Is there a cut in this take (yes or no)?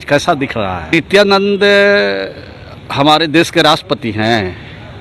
yes